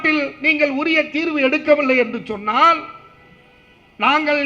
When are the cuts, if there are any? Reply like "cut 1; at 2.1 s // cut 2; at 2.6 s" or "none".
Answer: none